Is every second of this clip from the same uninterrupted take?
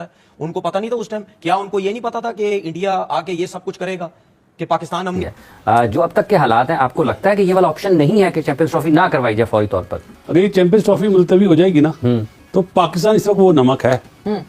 no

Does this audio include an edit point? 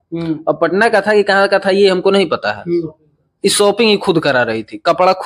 no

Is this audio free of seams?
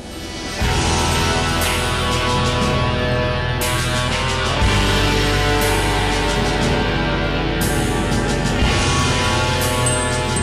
no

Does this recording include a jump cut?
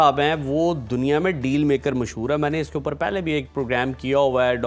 no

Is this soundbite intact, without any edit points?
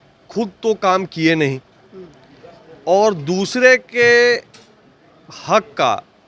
yes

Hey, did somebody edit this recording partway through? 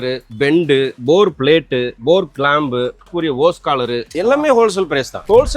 yes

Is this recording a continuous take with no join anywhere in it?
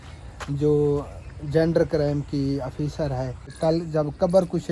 no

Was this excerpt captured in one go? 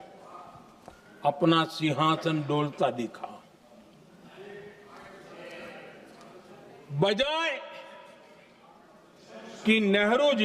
yes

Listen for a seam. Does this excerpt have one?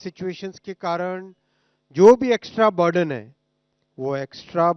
no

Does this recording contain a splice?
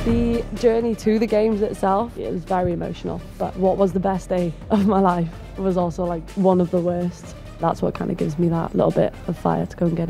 yes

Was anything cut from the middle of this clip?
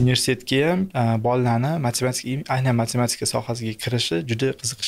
yes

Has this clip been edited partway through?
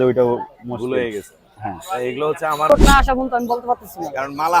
yes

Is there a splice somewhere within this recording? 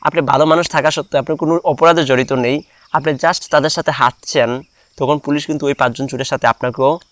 no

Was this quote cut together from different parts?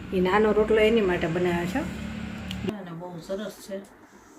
yes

